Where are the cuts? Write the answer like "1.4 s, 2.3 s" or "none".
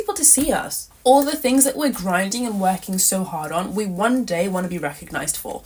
none